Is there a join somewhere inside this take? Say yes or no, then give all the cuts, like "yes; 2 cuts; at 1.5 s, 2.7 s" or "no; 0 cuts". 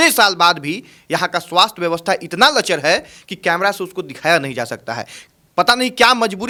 no; 0 cuts